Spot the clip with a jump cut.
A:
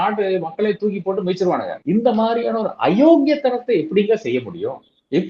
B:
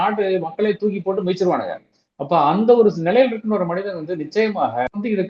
A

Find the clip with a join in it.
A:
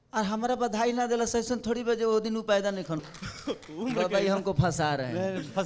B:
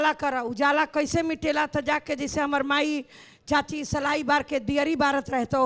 A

